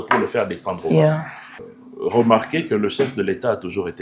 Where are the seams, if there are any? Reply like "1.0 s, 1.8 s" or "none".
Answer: 1.6 s